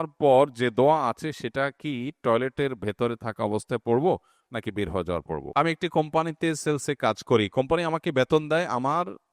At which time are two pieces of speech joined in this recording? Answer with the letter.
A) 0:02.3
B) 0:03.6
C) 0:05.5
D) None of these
C